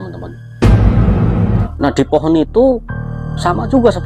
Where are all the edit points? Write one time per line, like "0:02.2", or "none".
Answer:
0:01.7